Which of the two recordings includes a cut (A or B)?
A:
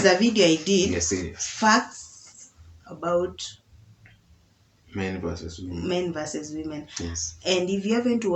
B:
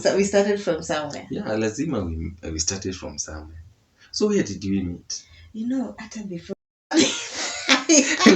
B